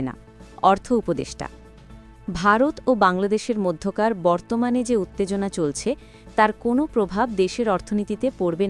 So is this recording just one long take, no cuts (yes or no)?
yes